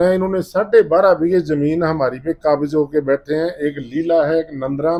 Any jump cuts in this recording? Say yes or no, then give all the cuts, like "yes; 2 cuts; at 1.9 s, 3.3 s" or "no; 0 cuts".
no; 0 cuts